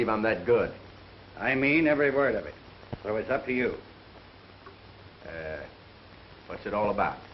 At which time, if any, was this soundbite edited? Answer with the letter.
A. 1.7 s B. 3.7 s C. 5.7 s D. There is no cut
A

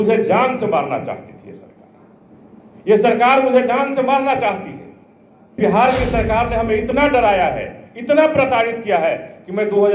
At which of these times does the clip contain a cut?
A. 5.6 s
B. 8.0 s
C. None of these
A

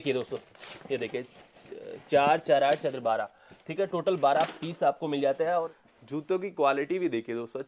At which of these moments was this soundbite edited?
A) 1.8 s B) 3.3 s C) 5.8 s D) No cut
C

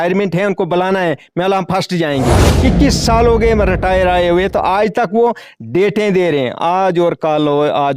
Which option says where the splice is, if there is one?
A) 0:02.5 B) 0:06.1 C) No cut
A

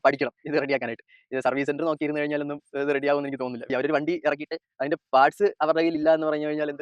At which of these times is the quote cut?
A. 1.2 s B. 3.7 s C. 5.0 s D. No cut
B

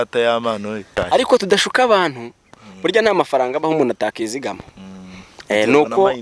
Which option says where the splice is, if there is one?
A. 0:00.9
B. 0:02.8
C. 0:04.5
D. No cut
A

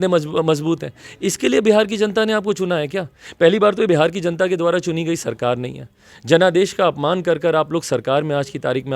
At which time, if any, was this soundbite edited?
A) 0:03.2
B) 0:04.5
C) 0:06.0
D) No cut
D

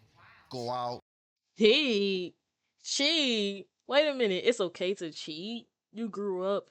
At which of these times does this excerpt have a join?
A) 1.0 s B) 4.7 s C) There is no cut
C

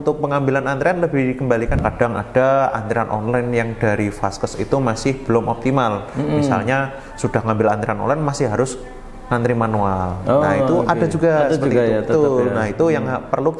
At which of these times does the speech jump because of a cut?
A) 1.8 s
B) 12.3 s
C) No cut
A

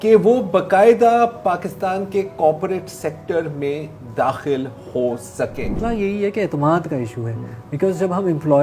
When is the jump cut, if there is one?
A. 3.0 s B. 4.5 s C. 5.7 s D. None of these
C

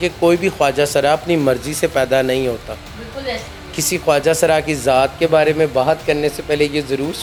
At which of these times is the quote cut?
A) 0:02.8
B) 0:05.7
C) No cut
C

